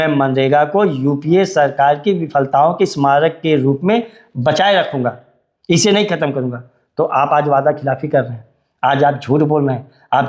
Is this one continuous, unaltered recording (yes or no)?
yes